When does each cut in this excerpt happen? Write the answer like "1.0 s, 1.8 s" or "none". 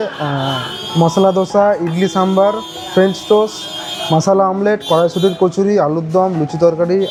none